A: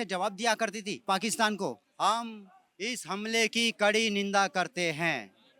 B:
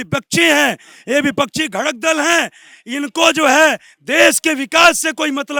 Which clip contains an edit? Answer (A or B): A